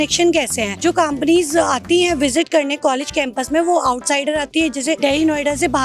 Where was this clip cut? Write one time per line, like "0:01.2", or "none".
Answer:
none

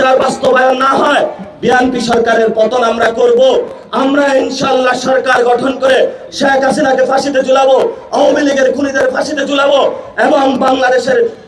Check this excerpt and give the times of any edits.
none

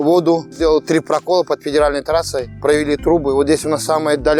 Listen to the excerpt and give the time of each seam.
none

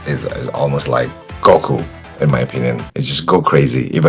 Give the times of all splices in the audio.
0:01.2
0:02.9

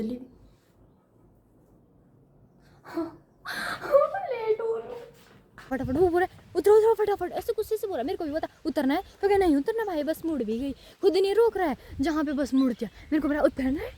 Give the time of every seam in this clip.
0:05.7

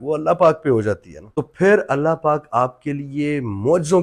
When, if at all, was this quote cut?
none

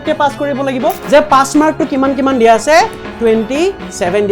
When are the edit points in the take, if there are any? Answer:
0:01.0

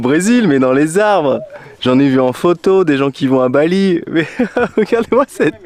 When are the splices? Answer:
none

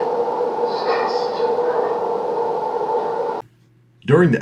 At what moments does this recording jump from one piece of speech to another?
0:02.5
0:03.4

